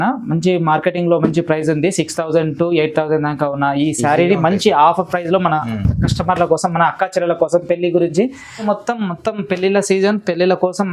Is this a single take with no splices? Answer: no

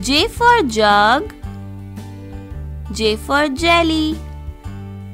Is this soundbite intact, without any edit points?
no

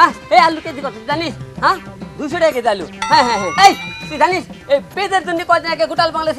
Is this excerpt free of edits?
yes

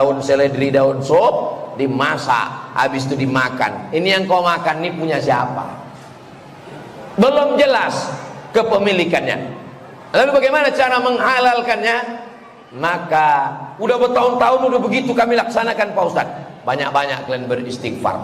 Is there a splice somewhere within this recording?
yes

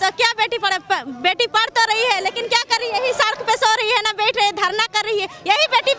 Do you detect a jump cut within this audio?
no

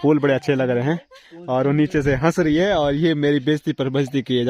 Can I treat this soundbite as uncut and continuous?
yes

